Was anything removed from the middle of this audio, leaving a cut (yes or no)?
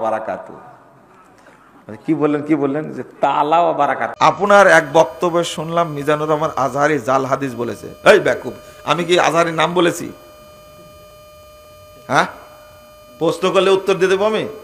yes